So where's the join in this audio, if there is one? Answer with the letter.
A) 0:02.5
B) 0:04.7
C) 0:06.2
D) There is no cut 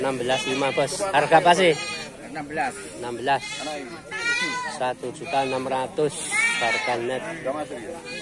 D